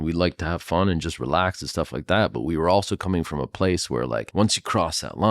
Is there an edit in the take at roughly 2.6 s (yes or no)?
no